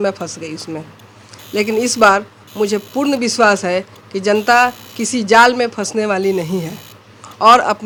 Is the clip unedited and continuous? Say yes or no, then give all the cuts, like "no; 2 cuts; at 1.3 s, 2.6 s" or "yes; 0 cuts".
yes; 0 cuts